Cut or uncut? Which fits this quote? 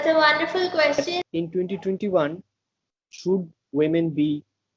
cut